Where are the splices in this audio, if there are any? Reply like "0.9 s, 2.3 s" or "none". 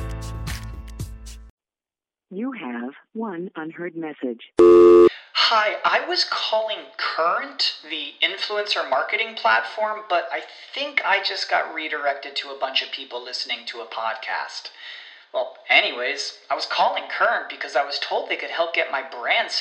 1.5 s